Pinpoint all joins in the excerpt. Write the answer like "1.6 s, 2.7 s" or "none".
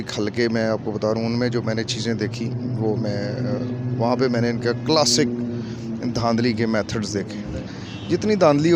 7.8 s

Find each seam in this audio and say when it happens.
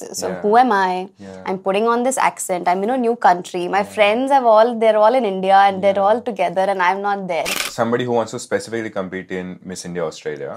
7.7 s

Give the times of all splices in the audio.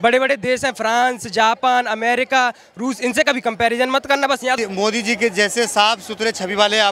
4.6 s

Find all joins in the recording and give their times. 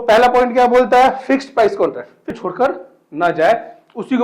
2.3 s

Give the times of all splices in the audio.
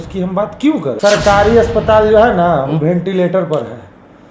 0.9 s

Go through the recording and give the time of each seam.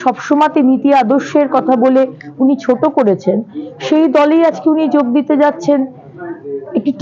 none

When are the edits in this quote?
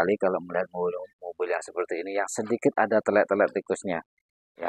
none

